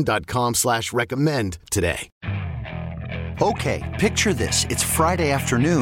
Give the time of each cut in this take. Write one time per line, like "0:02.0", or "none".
0:02.1